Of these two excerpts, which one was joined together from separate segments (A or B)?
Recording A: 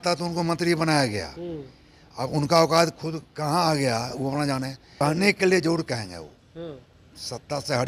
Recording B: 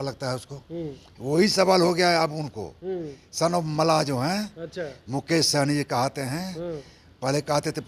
A